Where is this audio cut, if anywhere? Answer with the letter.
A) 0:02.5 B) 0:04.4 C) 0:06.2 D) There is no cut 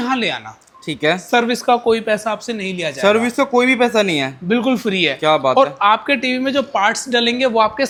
D